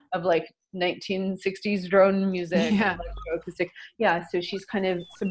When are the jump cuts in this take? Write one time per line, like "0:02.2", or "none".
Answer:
none